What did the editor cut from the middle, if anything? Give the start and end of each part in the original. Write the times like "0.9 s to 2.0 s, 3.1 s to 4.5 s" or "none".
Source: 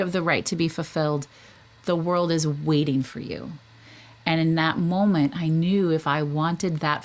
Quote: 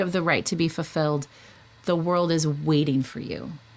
none